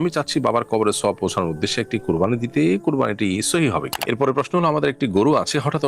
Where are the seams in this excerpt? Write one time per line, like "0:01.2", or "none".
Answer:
0:03.9